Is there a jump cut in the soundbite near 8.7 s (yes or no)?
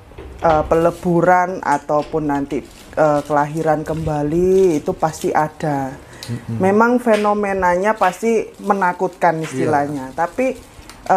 no